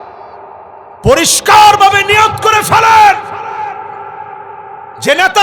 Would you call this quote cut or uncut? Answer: cut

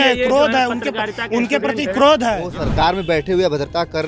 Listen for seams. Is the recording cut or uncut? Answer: cut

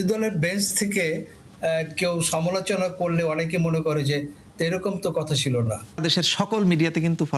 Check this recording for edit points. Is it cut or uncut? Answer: cut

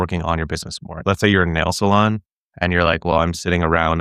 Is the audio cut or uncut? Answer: cut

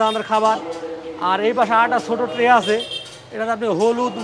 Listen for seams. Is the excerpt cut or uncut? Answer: uncut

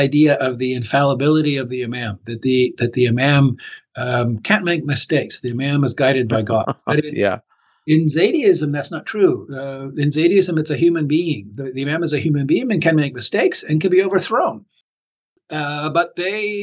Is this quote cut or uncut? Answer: cut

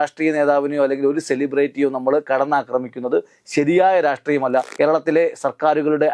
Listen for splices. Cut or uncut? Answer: cut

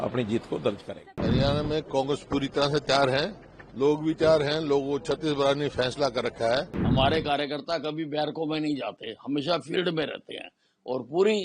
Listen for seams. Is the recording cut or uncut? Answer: cut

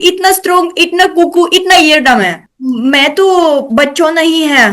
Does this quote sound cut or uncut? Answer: cut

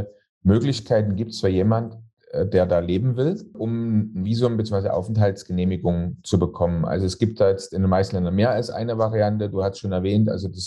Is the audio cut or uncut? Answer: uncut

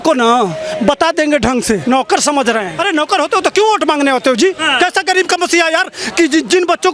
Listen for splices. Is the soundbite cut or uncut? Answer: cut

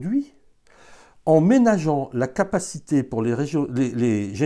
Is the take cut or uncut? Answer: uncut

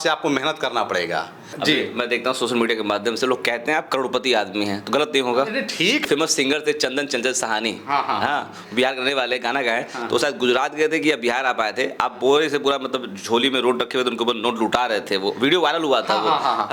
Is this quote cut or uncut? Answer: cut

